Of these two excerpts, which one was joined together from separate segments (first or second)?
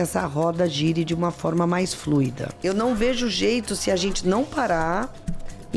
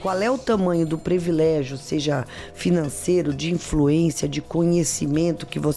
first